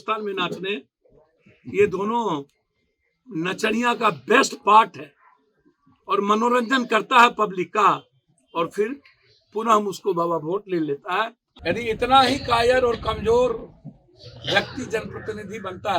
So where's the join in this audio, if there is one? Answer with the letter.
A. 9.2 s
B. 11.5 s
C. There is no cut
B